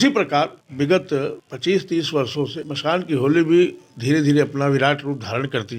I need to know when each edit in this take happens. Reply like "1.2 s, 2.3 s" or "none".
1.0 s, 2.6 s